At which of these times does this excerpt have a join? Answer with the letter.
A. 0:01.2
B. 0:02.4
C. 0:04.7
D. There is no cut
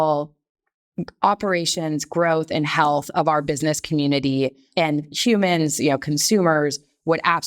C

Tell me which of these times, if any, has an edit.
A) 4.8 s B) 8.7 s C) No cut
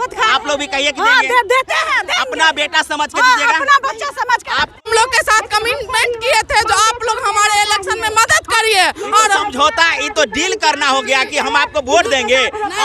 A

